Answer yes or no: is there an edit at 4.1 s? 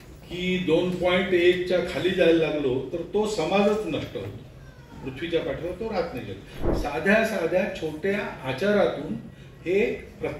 no